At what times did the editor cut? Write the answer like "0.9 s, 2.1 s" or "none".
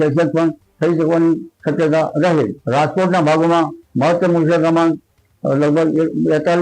2.6 s